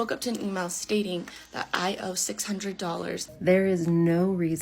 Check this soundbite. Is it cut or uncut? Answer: cut